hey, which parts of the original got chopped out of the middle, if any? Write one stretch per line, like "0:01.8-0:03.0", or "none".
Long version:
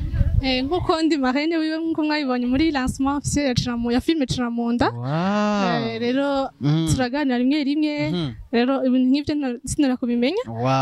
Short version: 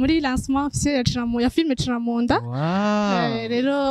none